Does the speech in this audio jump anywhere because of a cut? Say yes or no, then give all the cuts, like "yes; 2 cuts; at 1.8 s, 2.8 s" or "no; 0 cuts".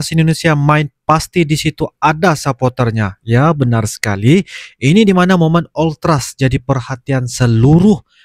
no; 0 cuts